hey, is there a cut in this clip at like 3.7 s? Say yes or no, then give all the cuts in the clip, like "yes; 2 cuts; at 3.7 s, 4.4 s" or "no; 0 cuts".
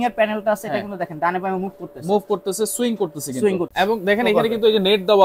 yes; 1 cut; at 3.7 s